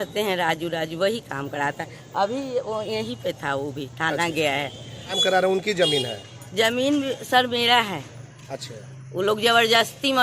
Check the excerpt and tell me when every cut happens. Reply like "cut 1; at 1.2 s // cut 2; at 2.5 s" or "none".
cut 1; at 5.2 s